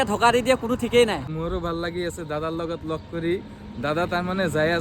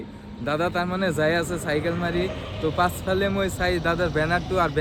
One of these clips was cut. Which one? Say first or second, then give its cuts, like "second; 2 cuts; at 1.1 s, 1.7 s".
first; 1 cut; at 1.2 s